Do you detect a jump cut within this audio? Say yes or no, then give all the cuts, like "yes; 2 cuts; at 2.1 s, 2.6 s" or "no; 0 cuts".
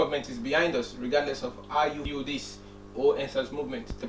yes; 1 cut; at 2.0 s